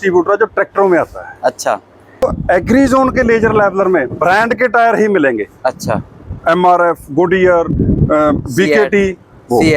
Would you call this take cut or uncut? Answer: cut